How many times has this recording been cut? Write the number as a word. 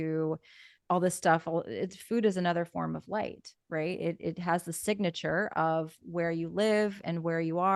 zero